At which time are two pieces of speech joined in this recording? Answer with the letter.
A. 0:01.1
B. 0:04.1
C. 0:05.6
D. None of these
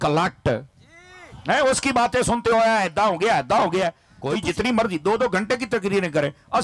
B